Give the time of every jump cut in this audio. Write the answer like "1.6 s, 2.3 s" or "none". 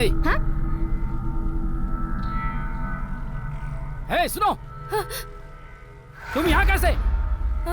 none